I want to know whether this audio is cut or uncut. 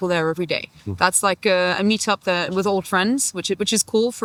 uncut